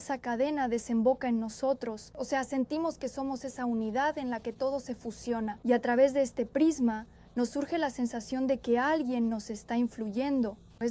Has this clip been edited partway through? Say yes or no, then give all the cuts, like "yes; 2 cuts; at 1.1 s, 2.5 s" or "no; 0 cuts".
yes; 2 cuts; at 2.1 s, 5.6 s